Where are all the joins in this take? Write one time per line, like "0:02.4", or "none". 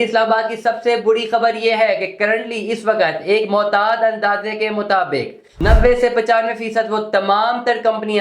0:05.6